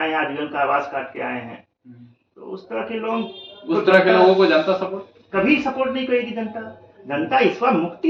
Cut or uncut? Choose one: uncut